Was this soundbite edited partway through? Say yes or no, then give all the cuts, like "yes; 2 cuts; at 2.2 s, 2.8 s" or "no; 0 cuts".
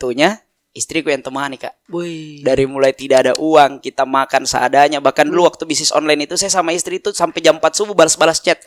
no; 0 cuts